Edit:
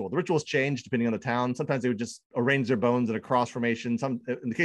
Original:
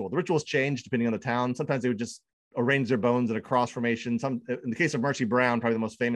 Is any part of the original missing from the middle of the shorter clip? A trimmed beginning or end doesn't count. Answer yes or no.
yes